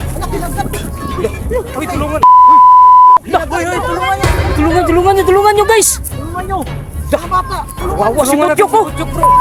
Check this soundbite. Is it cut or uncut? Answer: uncut